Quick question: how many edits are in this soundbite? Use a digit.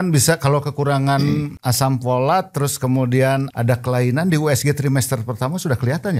2